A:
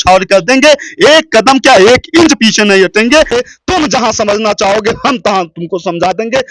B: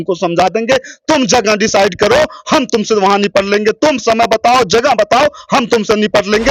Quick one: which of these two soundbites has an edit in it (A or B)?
A